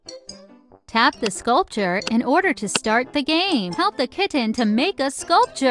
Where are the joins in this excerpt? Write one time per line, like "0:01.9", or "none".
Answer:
0:03.7